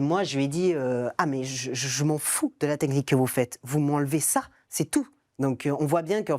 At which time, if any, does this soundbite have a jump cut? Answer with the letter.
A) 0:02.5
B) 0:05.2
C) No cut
B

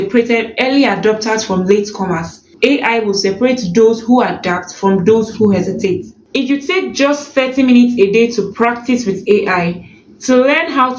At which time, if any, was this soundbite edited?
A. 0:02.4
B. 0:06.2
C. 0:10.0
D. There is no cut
B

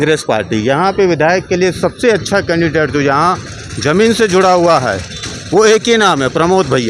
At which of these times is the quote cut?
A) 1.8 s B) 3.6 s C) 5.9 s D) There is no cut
D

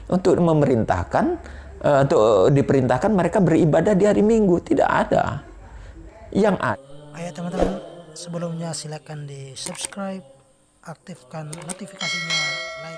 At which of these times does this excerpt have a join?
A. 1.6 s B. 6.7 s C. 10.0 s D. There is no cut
B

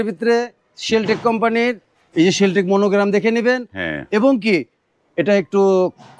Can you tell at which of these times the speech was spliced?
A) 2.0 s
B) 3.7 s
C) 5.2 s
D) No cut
D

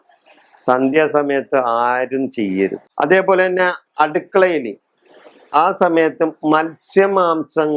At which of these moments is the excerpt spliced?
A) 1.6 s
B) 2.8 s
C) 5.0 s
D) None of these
B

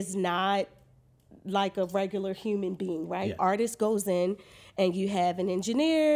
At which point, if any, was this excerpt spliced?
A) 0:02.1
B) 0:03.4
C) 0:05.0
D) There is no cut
B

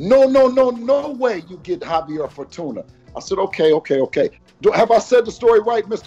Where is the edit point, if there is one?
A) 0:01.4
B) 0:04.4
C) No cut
B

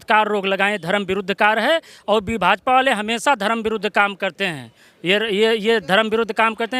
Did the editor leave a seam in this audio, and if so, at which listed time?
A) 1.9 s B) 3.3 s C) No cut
C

